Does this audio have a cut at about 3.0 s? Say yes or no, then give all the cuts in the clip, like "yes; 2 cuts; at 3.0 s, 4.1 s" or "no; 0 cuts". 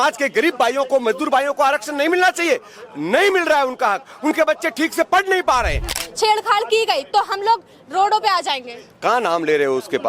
no; 1 cut; at 5.9 s